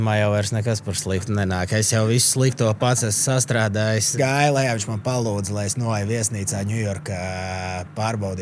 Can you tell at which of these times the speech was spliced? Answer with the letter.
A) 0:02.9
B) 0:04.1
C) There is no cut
B